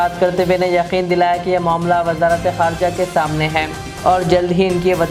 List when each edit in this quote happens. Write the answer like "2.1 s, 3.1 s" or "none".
none